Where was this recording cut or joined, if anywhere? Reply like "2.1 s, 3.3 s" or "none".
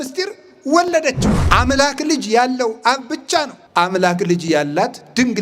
1.3 s, 3.6 s